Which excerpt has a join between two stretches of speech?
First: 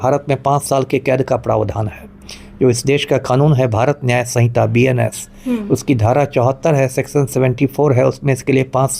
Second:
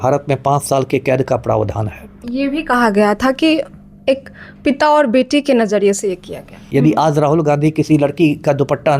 second; 2 cuts; at 2.3 s, 6.6 s

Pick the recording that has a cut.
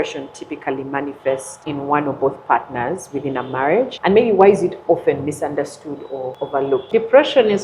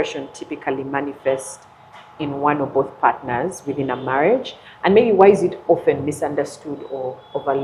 first; 3 cuts; at 1.5 s, 3.9 s, 6.8 s

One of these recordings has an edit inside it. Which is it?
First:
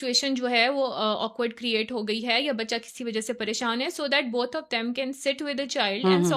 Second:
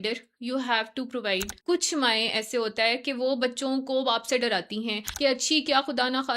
second; 2 cuts; at 1.5 s, 5.0 s

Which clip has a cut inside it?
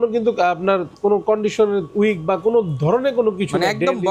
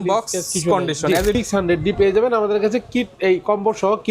second; 1 cut; at 1.4 s

